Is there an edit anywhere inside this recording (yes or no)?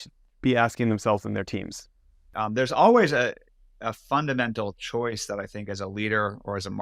yes